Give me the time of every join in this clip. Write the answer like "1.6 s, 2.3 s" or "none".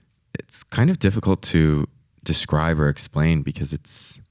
none